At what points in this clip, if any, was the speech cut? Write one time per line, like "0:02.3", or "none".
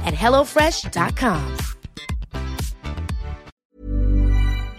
0:03.5